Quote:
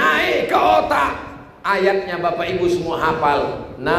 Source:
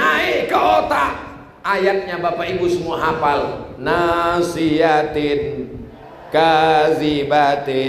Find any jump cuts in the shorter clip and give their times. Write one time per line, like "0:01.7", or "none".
none